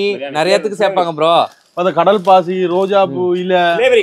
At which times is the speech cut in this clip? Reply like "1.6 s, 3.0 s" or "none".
none